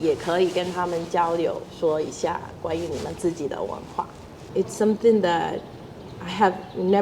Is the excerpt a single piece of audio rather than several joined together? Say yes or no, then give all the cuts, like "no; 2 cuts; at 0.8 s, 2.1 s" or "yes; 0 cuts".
no; 1 cut; at 4.4 s